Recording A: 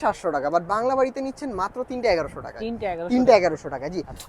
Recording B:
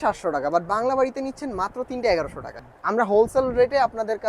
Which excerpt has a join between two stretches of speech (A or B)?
B